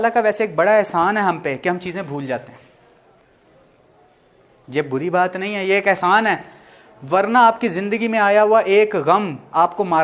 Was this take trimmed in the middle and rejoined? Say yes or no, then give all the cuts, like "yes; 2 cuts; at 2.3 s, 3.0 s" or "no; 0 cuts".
no; 0 cuts